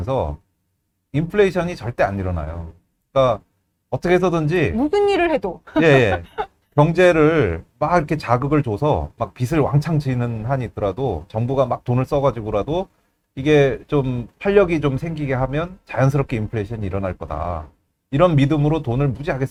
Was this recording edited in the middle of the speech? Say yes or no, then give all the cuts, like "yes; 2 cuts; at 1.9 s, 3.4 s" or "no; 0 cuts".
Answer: no; 0 cuts